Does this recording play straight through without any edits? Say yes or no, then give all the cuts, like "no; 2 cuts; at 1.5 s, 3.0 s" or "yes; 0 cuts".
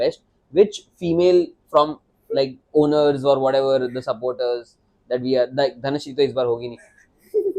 yes; 0 cuts